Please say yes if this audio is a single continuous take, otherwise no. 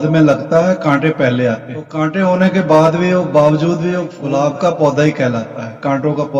no